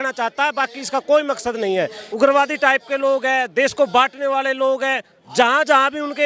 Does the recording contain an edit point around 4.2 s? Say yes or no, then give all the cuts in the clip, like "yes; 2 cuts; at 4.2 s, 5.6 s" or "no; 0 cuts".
no; 1 cut; at 2.0 s